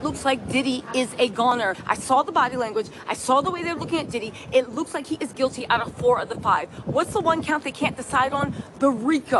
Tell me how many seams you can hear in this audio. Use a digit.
0